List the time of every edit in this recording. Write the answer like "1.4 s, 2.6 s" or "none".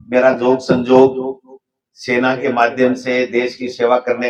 none